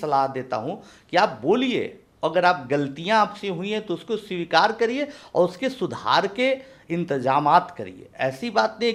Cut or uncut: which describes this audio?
uncut